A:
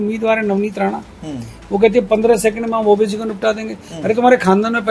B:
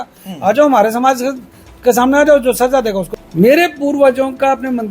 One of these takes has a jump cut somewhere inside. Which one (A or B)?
B